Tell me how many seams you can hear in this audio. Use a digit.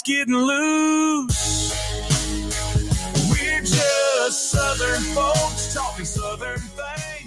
0